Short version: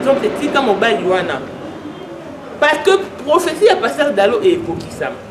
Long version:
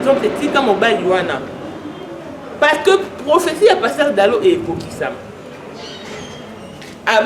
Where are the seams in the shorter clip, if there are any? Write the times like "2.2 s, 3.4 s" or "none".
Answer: none